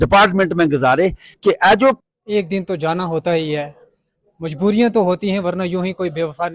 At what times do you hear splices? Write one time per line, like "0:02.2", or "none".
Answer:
0:02.0